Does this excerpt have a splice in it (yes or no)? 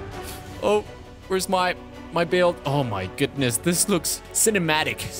yes